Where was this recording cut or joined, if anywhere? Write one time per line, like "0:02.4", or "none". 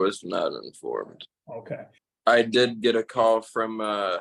0:01.8